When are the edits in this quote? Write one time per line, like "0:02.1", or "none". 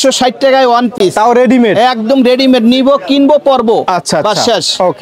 none

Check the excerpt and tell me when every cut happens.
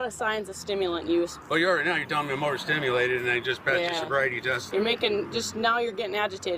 0:01.4
0:04.6

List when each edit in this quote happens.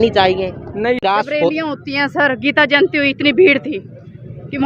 0:01.0

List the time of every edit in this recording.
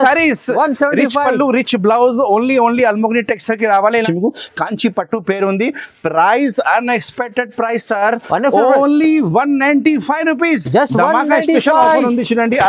0:04.0

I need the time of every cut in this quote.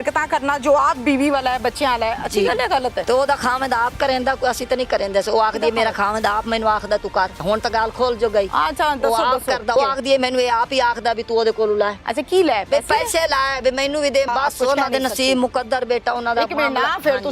0:03.0
0:07.4
0:09.8
0:12.0
0:14.3

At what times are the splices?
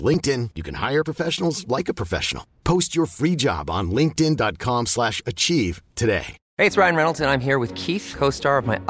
0:06.4

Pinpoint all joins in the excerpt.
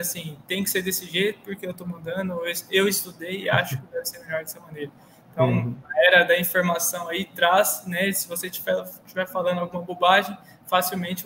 none

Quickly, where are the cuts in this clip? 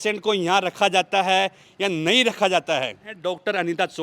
0:03.1

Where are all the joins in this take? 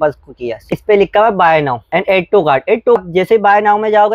0:00.8
0:01.9
0:03.0

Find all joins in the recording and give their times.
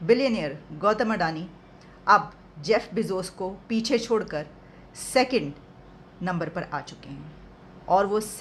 none

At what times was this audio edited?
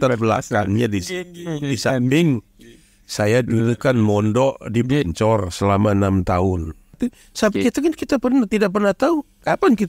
0:07.0

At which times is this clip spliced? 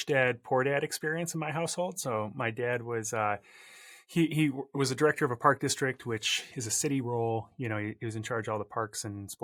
none

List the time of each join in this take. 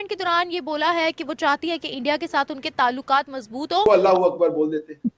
0:03.9

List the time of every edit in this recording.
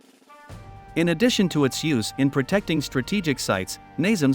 0:00.9

